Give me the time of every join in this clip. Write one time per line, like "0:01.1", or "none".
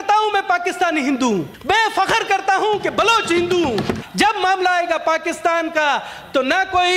0:01.5
0:04.0

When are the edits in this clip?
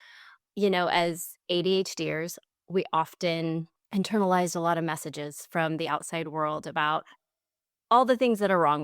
0:03.8

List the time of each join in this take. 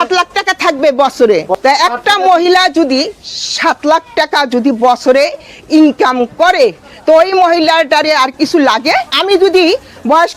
0:01.5
0:09.2

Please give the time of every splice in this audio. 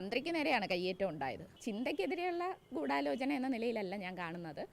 0:01.6

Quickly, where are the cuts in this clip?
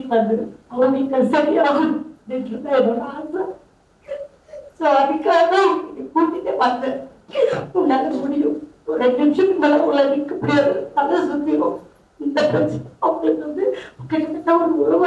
none

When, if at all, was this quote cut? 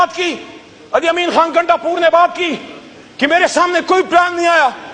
none

